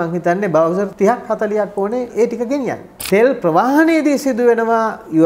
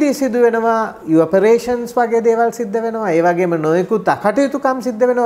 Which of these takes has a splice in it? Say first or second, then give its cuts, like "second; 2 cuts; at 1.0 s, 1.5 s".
first; 3 cuts; at 0.9 s, 2.1 s, 2.9 s